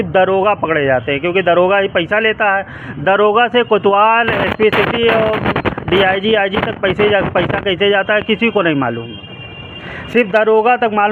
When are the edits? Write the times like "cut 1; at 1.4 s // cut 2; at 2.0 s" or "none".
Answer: none